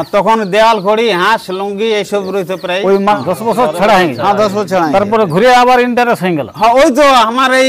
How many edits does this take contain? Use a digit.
1